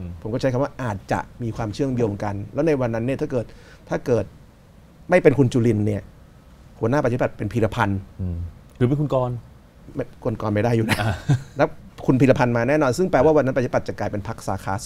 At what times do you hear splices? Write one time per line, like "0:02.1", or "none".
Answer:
none